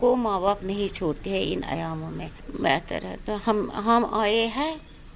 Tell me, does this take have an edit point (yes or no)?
no